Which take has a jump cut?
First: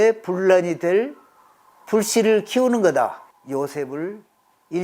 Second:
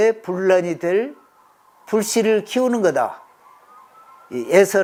first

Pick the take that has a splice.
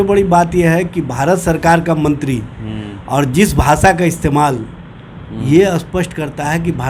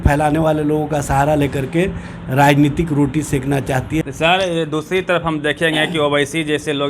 second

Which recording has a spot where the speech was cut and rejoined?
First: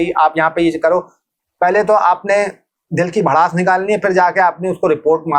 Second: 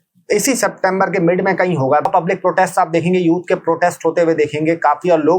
second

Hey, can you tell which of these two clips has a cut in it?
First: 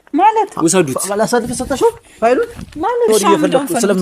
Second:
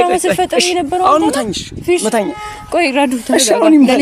first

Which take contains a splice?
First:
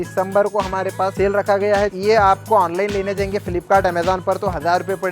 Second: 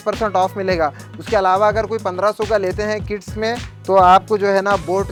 first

